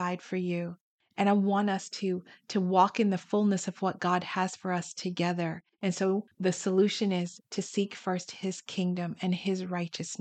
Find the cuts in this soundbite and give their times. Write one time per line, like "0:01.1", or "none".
0:06.0